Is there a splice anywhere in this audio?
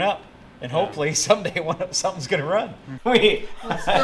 yes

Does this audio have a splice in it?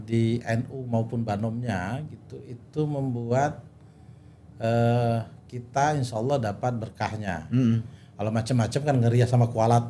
no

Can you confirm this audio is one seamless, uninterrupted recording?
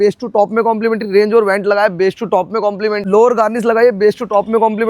no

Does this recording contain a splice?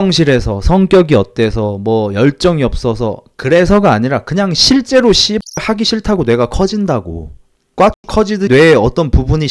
yes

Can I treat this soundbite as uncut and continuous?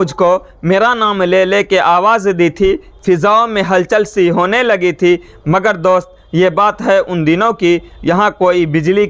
yes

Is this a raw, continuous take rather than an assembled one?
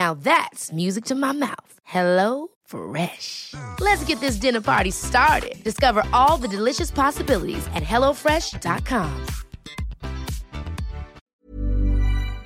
no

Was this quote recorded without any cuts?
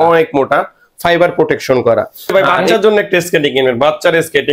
no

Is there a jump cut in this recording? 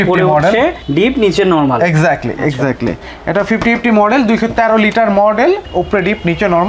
no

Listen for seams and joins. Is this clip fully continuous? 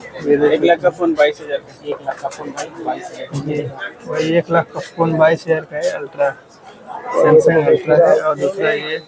yes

